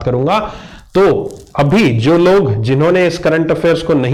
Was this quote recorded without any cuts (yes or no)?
yes